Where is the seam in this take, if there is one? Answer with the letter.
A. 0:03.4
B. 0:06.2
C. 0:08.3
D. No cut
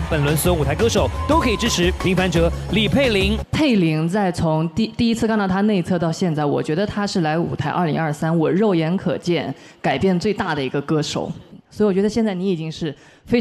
A